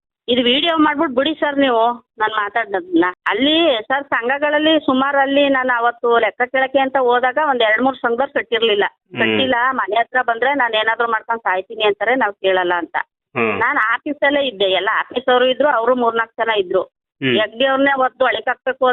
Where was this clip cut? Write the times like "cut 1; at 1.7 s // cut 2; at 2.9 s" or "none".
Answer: cut 1; at 3.2 s